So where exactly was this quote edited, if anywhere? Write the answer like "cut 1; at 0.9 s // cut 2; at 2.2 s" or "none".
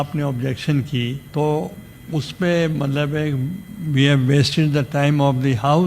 cut 1; at 1.2 s